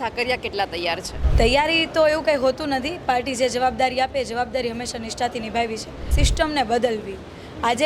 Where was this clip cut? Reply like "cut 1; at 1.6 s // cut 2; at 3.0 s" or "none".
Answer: cut 1; at 1.2 s // cut 2; at 6.2 s